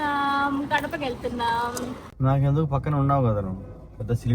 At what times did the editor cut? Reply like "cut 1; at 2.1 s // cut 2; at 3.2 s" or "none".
cut 1; at 2.0 s